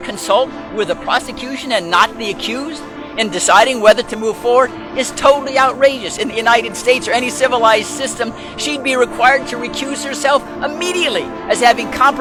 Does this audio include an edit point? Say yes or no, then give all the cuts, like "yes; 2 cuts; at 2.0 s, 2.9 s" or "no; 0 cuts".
no; 0 cuts